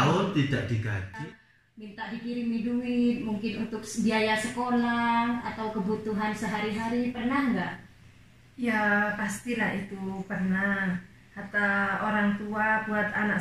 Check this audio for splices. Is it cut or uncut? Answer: cut